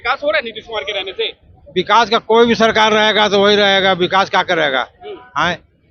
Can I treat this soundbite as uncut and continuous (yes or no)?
yes